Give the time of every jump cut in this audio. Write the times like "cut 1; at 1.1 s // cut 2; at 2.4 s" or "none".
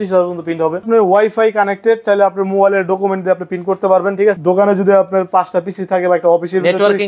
cut 1; at 0.8 s // cut 2; at 4.4 s